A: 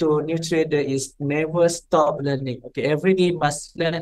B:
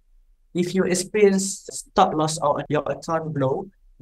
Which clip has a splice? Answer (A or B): B